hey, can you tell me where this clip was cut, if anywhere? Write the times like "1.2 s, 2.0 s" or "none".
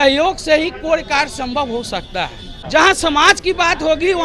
2.5 s